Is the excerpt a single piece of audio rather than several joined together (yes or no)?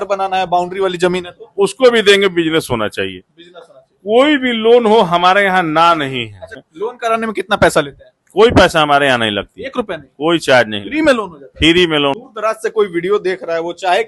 no